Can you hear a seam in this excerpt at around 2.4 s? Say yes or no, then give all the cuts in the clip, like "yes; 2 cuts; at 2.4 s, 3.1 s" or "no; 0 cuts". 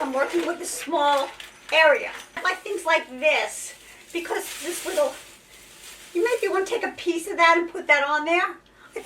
yes; 1 cut; at 2.4 s